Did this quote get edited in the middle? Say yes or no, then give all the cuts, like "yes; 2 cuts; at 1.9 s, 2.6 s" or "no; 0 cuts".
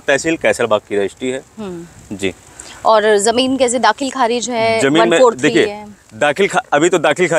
no; 0 cuts